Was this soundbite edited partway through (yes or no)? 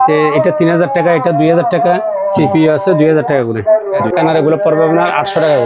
yes